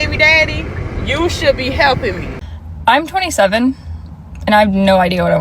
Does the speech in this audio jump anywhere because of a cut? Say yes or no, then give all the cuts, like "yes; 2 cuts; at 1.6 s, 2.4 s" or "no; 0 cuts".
yes; 1 cut; at 2.4 s